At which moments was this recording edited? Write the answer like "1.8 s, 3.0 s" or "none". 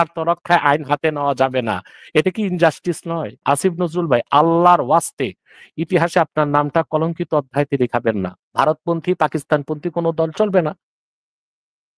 3.4 s, 8.4 s